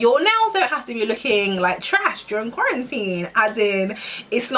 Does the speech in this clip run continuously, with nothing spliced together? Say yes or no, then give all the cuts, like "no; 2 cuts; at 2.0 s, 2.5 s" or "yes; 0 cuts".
yes; 0 cuts